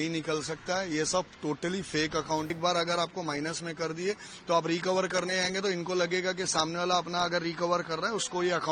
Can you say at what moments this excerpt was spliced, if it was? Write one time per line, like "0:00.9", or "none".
0:02.5